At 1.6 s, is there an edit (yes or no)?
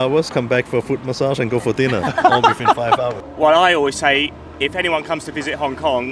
no